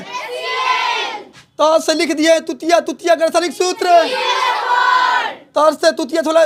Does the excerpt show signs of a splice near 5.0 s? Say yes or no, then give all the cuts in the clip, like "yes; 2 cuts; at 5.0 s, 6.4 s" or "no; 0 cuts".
no; 0 cuts